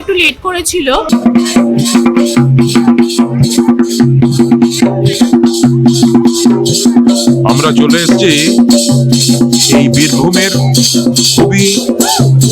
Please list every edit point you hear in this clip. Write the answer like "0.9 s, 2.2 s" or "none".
1.1 s